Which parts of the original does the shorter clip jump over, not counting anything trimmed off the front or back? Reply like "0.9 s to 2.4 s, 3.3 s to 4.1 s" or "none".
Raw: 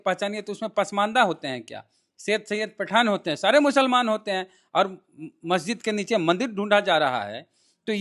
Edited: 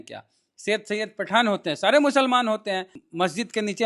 4.6 s to 5.3 s